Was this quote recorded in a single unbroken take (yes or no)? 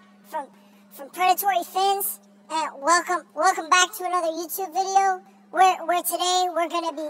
yes